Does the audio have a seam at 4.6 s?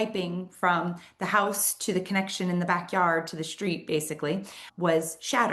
yes; 1 cut; at 4.6 s

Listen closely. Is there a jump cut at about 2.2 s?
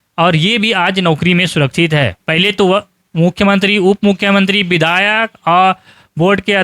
yes; 1 cut; at 2.2 s

